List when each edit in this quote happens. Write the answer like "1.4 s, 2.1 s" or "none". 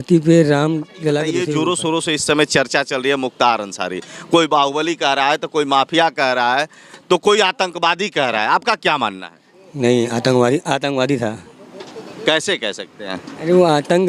1.4 s